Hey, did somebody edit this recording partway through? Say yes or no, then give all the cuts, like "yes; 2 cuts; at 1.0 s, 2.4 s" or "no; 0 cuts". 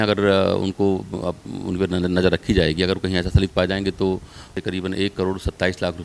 yes; 1 cut; at 4.5 s